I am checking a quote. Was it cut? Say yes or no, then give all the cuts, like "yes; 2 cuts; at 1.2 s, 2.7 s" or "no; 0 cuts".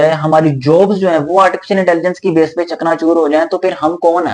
no; 0 cuts